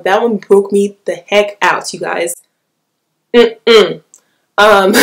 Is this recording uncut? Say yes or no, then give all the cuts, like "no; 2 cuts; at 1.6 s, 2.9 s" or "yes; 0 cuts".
yes; 0 cuts